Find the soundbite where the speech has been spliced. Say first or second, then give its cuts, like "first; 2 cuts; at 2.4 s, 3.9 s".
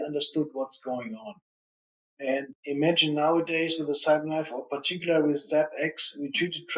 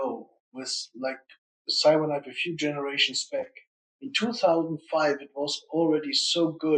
first; 1 cut; at 2.5 s